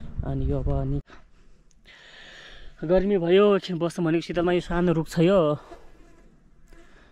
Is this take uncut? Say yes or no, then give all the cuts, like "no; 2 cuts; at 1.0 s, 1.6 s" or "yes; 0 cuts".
no; 1 cut; at 1.0 s